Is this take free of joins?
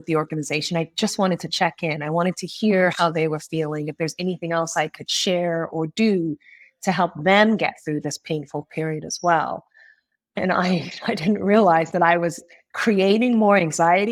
yes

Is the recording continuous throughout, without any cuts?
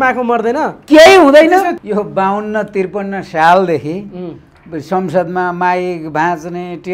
no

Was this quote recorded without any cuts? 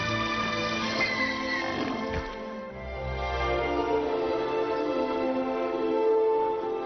no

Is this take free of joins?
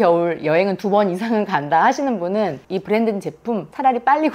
yes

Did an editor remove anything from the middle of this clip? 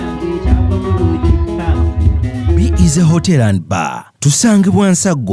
yes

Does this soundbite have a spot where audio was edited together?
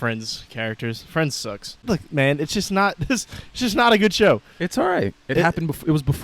yes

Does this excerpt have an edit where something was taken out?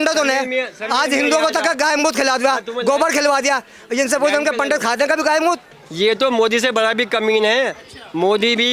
yes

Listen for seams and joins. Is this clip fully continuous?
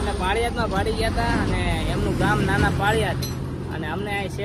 yes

